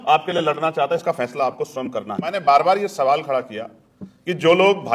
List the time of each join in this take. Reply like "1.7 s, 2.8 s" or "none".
2.3 s